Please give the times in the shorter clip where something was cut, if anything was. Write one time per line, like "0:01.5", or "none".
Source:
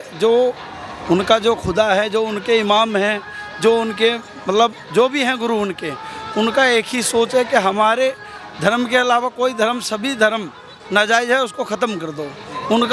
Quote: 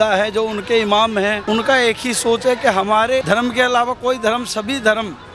0:01.4
0:03.2